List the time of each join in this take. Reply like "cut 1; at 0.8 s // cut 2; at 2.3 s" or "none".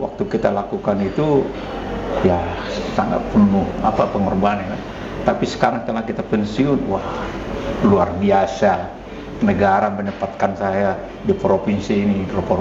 none